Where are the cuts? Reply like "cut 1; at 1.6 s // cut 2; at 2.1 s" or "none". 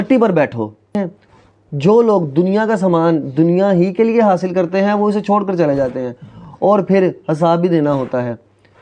cut 1; at 1.0 s